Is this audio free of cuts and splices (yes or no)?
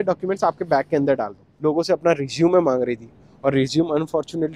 no